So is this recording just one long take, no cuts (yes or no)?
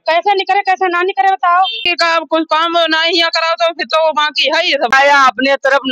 no